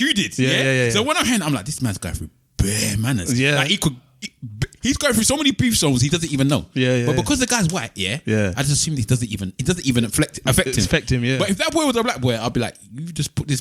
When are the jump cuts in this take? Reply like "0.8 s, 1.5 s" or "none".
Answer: none